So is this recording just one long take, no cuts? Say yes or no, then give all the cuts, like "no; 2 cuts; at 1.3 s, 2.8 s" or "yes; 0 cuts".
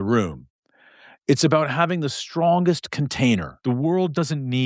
no; 1 cut; at 3.5 s